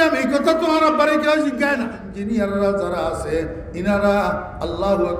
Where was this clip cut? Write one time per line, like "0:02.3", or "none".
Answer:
0:02.0